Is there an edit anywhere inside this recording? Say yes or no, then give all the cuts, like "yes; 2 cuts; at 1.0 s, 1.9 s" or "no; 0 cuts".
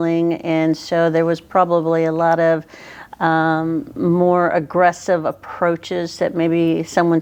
no; 0 cuts